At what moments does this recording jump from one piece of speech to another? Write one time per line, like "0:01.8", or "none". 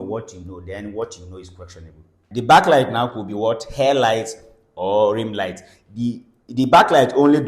0:02.2